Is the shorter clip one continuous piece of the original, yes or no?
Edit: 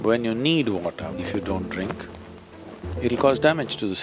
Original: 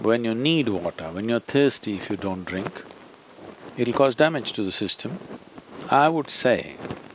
no